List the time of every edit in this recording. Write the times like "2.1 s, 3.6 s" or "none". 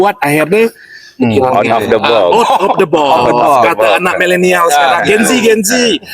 1.3 s